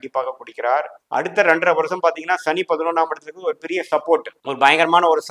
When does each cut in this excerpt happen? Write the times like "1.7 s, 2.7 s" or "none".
none